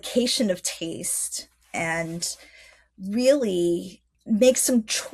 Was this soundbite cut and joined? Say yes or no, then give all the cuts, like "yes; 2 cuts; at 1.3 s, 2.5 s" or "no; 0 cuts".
yes; 1 cut; at 4.1 s